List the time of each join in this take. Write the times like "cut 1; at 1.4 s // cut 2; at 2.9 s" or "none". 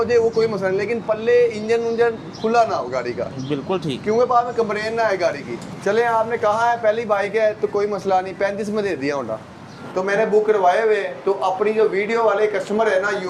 cut 1; at 5.7 s // cut 2; at 9.8 s